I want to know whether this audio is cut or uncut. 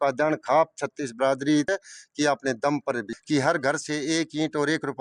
cut